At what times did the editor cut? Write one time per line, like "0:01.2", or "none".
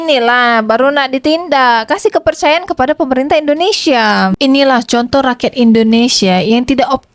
0:04.4